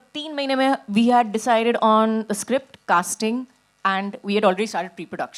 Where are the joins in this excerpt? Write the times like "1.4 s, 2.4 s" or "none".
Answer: none